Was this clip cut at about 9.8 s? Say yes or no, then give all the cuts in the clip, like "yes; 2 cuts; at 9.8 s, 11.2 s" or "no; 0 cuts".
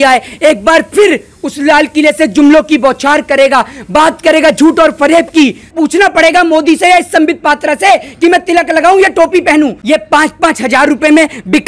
yes; 2 cuts; at 5.7 s, 9.8 s